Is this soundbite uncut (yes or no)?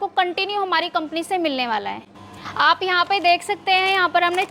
yes